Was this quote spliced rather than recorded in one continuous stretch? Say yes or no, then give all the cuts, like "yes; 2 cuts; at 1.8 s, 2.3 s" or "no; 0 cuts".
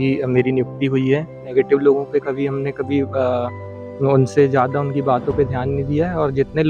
yes; 1 cut; at 1.4 s